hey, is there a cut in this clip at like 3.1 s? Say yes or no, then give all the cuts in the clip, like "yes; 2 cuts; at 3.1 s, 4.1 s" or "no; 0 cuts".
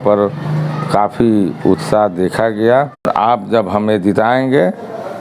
yes; 1 cut; at 3.1 s